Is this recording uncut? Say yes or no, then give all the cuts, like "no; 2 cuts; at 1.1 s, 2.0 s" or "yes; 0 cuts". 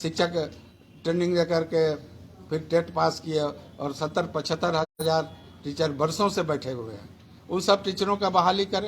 yes; 0 cuts